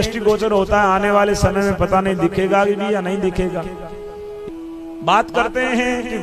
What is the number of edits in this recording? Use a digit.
1